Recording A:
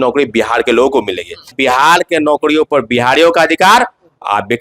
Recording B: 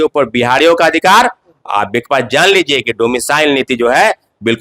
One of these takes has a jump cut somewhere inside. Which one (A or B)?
A